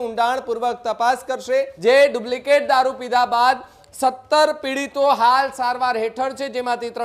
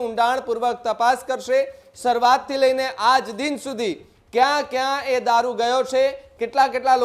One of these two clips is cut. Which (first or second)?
first